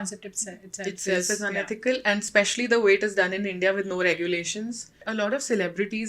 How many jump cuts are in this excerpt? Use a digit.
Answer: 1